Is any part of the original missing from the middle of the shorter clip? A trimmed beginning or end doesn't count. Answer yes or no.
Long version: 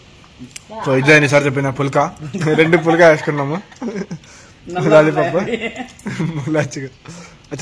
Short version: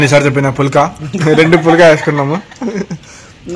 no